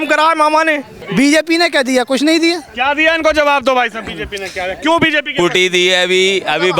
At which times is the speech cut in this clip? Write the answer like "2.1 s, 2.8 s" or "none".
1.0 s

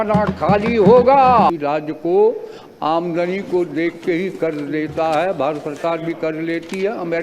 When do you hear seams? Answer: 1.6 s

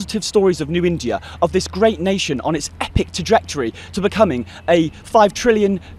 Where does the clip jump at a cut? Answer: none

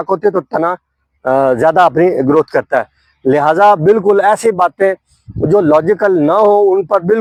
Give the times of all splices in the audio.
none

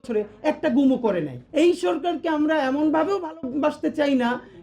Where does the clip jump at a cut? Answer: 1.4 s

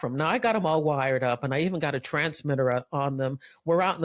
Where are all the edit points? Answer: none

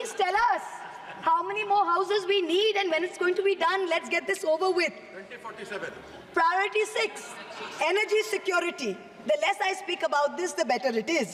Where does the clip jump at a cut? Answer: none

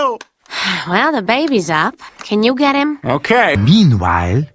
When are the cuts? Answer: 3.6 s

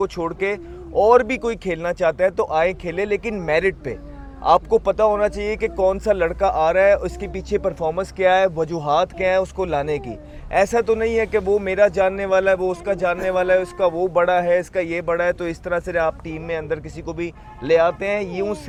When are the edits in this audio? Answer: none

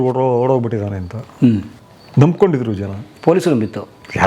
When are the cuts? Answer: none

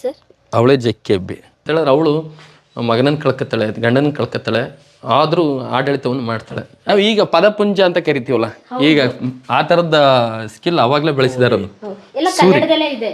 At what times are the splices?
1.6 s, 6.9 s

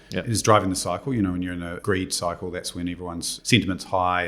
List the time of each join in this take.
1.7 s, 3.3 s

